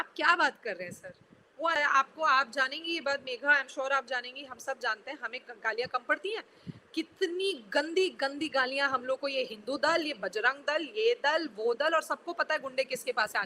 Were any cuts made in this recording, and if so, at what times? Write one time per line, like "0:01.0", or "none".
0:01.8

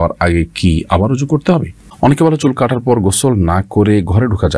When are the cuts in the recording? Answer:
0:01.8

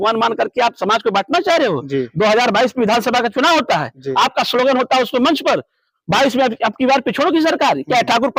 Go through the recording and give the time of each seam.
none

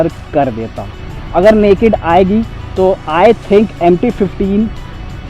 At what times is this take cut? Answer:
0:01.1

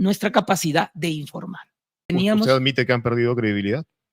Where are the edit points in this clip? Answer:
0:02.1

